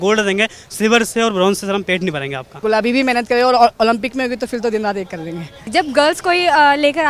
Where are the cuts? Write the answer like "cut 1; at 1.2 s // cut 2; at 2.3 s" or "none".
cut 1; at 2.6 s // cut 2; at 5.7 s